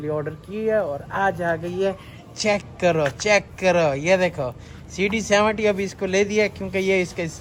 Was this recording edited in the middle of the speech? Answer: no; 0 cuts

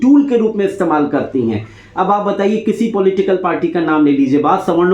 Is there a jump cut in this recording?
no; 0 cuts

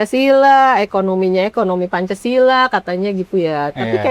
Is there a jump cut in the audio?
no; 0 cuts

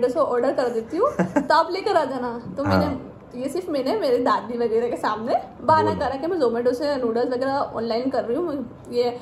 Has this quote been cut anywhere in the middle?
no; 0 cuts

